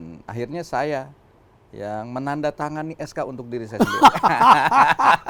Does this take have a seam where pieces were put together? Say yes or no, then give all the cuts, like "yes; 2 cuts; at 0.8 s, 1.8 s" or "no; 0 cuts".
no; 0 cuts